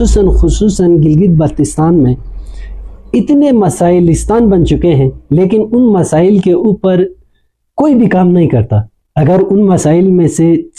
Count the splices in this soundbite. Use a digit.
0